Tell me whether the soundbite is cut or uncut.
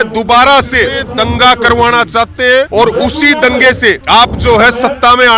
cut